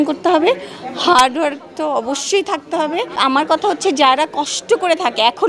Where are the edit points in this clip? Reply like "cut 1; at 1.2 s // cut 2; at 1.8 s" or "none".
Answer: cut 1; at 3.1 s